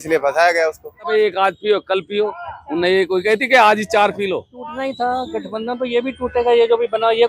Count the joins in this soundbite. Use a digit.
2